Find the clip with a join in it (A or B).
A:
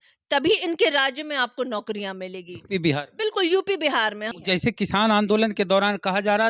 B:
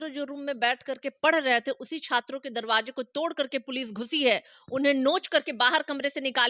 A